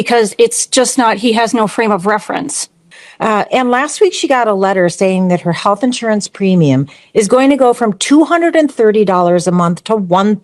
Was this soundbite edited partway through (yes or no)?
yes